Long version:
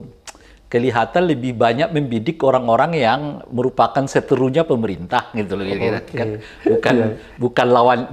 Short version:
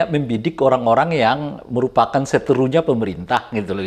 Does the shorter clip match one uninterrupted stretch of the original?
yes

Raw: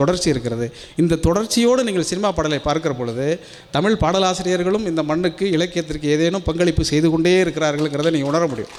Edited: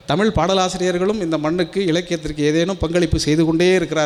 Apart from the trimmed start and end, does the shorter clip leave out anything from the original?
no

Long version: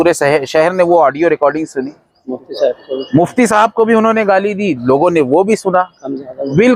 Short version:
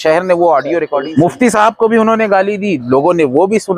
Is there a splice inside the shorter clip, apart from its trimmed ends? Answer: yes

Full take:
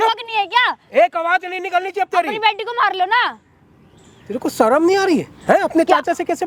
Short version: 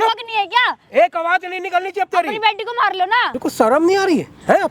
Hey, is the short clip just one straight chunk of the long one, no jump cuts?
no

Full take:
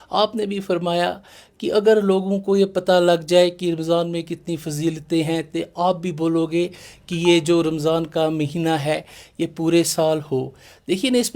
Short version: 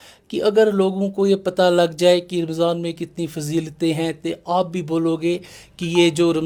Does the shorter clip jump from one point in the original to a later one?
no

